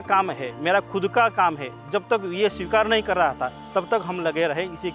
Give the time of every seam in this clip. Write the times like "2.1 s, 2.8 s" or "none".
none